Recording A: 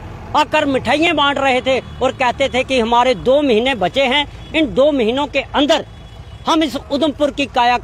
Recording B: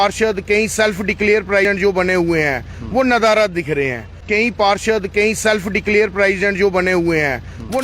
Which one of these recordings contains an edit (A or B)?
B